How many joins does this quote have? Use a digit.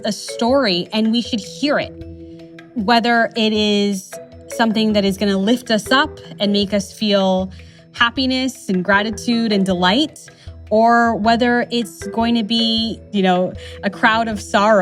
1